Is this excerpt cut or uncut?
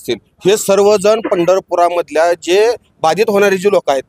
uncut